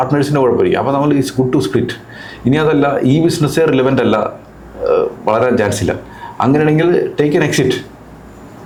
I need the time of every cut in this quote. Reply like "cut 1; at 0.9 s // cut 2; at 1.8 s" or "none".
none